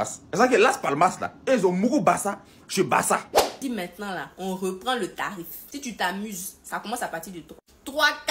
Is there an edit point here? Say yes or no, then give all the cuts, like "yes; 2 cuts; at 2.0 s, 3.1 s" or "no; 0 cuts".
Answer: yes; 1 cut; at 3.6 s